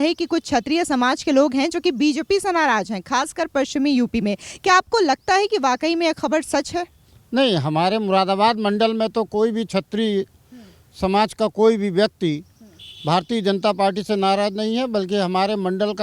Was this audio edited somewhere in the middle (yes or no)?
no